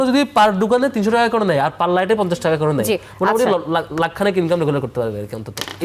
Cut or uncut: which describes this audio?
uncut